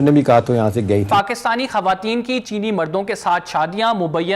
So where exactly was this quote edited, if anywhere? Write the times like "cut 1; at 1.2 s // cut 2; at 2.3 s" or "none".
cut 1; at 1.1 s